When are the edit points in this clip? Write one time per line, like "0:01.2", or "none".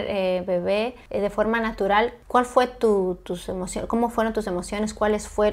0:01.0
0:02.2